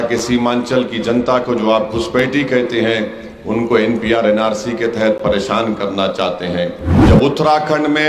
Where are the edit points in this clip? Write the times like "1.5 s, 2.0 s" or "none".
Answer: 6.9 s